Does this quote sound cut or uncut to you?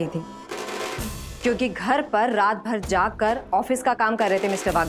uncut